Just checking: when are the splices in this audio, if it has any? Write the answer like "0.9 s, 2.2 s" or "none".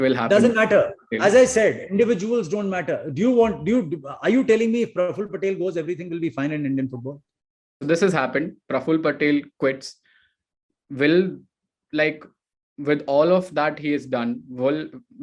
7.8 s